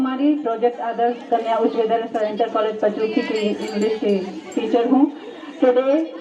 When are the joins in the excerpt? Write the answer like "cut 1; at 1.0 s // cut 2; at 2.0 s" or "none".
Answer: none